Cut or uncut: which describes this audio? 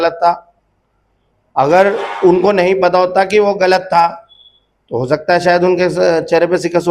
uncut